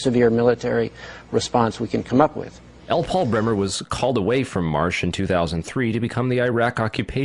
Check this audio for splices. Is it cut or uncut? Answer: cut